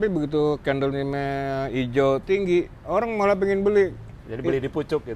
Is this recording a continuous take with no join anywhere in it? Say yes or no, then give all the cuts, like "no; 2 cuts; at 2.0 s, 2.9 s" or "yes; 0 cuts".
yes; 0 cuts